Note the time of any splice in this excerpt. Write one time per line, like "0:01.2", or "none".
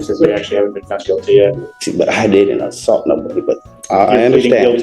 0:01.7